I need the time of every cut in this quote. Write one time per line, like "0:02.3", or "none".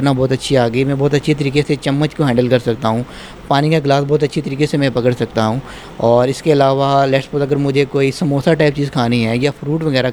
none